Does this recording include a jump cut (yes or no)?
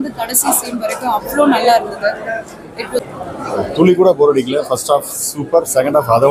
yes